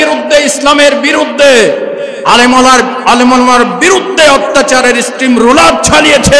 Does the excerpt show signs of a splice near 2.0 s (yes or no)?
no